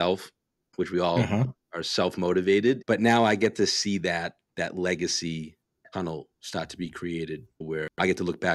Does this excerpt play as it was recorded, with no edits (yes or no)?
no